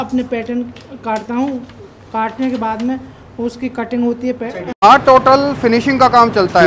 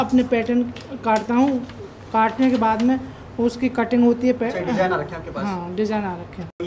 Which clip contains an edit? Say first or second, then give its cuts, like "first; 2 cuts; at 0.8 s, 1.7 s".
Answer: first; 1 cut; at 4.7 s